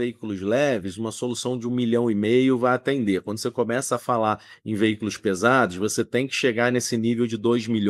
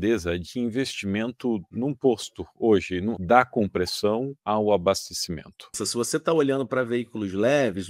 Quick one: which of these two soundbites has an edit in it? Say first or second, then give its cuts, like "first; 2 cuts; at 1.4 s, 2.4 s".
second; 4 cuts; at 1.7 s, 3.1 s, 4.3 s, 5.8 s